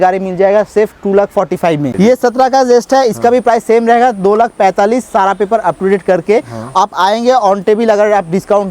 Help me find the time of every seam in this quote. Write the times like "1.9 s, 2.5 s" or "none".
1.9 s